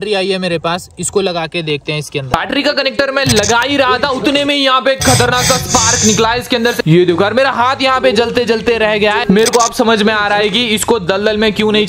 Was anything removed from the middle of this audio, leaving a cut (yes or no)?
no